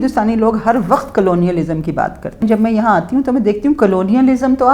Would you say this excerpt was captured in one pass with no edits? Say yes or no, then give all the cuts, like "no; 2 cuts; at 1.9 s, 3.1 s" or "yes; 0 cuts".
no; 1 cut; at 2.4 s